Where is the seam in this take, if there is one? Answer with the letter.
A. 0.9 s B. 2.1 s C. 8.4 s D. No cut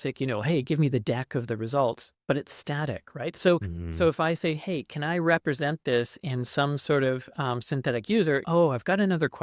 C